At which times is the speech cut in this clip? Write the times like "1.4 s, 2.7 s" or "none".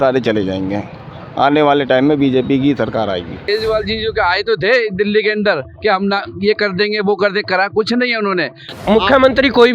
3.4 s, 8.6 s